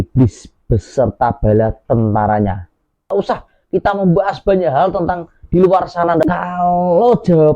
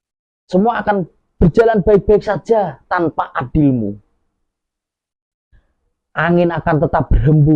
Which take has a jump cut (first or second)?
first